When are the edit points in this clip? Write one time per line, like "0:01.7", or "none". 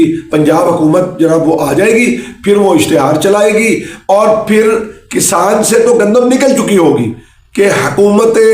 0:07.2